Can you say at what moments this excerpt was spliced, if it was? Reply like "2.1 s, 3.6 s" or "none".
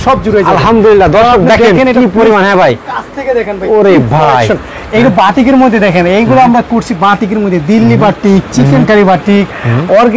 none